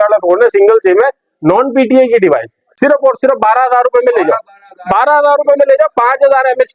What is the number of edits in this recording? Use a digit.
1